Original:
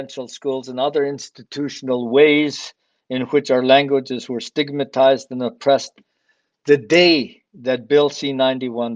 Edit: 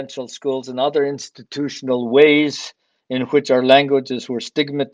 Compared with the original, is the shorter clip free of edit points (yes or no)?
yes